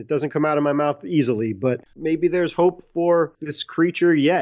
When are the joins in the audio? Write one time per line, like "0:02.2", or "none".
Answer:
0:01.9